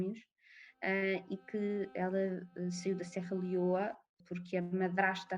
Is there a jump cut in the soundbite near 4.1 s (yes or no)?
yes